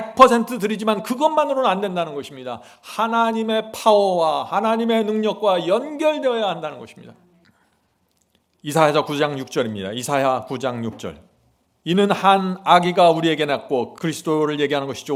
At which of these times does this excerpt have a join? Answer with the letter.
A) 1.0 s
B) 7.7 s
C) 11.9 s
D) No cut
D